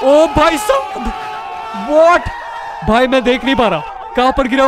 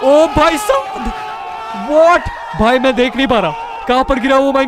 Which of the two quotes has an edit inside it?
second; 1 cut; at 2.4 s

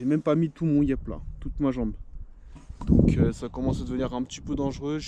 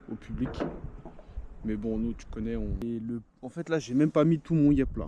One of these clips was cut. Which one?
second; 1 cut; at 2.8 s

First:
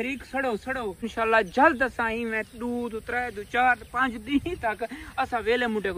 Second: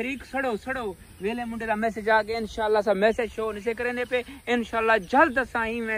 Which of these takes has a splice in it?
first; 1 cut; at 1.1 s

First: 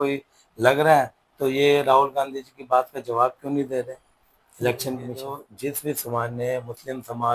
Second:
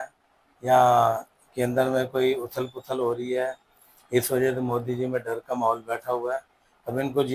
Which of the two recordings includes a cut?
first; 1 cut; at 5.5 s

